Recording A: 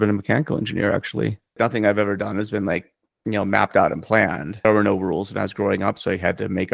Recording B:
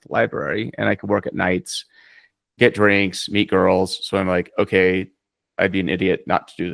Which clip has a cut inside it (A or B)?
A